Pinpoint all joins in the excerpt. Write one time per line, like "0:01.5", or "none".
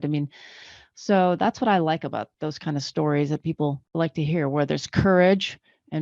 0:02.3
0:03.8